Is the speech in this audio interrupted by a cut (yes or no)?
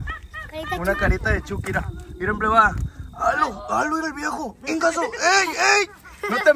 no